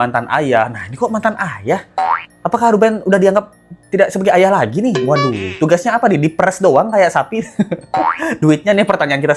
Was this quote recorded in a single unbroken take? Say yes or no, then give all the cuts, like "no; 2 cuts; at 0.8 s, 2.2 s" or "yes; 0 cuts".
yes; 0 cuts